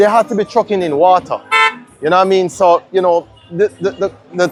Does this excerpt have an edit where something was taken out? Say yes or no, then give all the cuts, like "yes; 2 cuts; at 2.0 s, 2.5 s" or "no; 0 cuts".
no; 0 cuts